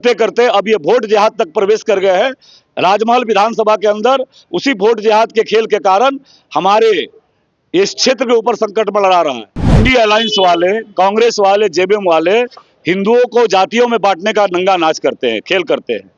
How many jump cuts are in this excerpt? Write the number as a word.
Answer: one